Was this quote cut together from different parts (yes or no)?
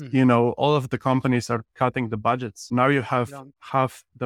yes